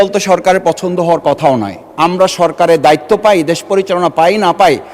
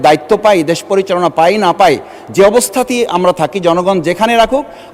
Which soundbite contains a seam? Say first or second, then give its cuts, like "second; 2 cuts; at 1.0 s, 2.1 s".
first; 1 cut; at 1.9 s